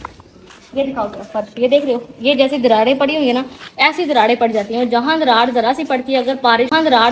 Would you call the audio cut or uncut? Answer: uncut